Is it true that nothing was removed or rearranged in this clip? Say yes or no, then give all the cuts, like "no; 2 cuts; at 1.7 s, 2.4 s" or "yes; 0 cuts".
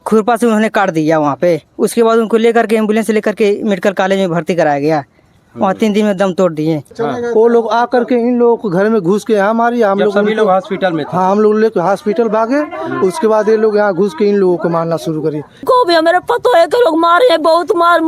no; 2 cuts; at 6.9 s, 15.6 s